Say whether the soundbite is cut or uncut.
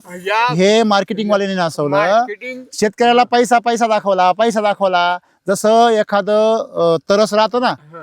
uncut